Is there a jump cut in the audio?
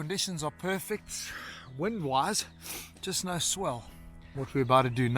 yes; 1 cut; at 4.3 s

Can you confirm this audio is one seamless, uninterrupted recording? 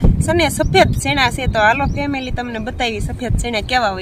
yes; 0 cuts

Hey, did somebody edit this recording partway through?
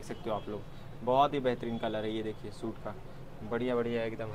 no; 0 cuts

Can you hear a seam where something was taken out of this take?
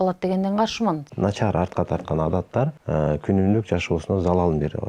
yes; 2 cuts; at 1.1 s, 2.8 s

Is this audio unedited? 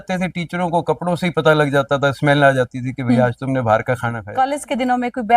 no; 1 cut; at 4.2 s

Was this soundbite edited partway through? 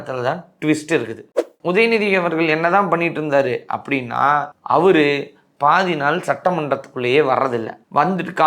yes; 1 cut; at 1.4 s

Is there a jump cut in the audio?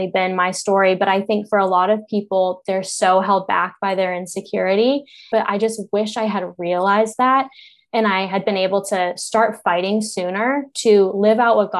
yes; 1 cut; at 5.3 s

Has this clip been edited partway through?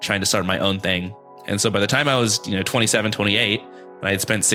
no; 0 cuts

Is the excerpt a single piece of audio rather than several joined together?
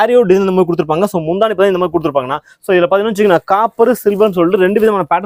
yes; 0 cuts

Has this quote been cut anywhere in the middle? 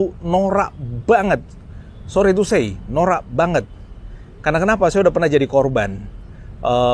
no; 0 cuts

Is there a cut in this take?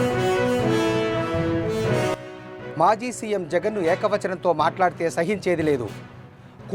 no; 0 cuts

